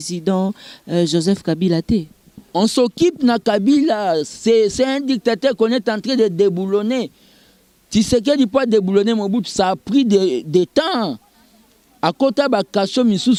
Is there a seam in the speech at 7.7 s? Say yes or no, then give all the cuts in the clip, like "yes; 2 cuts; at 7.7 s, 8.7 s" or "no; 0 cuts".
no; 0 cuts